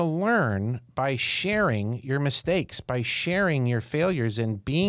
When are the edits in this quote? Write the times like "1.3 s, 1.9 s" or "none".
none